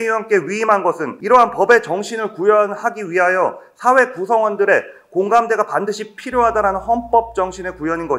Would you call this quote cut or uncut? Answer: uncut